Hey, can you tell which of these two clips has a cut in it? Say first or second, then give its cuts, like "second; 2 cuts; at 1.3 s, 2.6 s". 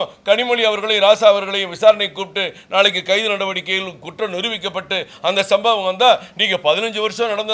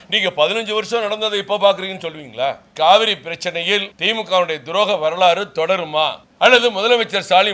second; 3 cuts; at 2.7 s, 4.0 s, 6.2 s